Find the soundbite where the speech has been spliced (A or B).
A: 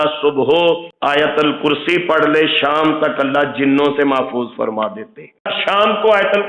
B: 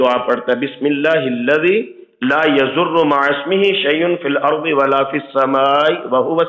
A